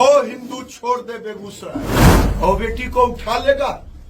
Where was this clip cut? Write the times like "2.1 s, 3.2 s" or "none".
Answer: 2.2 s